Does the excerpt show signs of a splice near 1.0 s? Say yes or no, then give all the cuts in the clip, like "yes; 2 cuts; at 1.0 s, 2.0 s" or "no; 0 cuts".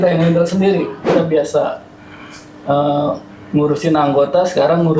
yes; 1 cut; at 1.0 s